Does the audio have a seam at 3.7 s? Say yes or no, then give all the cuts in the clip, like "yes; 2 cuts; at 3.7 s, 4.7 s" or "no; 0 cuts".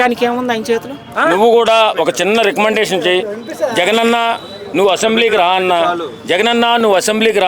no; 1 cut; at 1.1 s